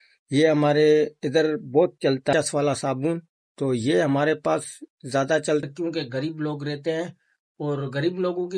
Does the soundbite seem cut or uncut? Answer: cut